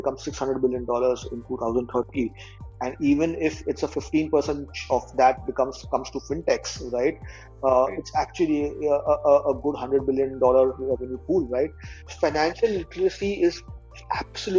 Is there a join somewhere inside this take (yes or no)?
yes